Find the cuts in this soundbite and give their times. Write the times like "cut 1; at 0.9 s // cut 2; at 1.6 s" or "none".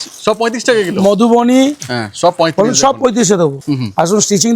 cut 1; at 3.6 s